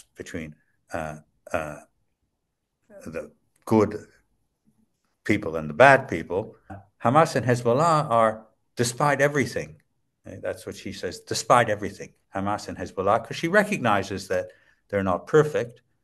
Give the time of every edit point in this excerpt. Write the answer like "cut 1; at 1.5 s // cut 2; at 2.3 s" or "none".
cut 1; at 6.9 s